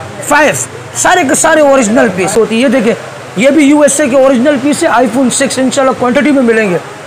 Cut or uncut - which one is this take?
cut